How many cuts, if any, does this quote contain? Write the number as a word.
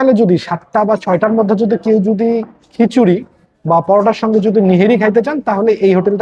zero